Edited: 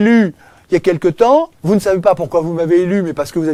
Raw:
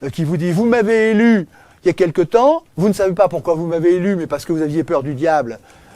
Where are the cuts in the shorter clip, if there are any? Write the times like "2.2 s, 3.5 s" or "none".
none